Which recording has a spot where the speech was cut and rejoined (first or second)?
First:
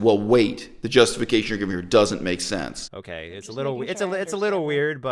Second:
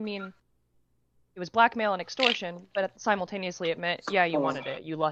first